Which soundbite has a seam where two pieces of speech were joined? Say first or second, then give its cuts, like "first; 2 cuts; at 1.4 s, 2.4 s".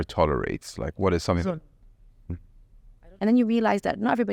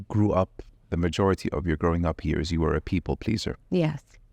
first; 1 cut; at 2.8 s